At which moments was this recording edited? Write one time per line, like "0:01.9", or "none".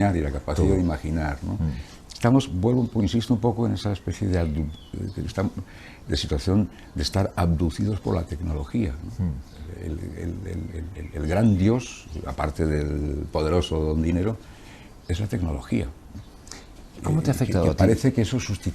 none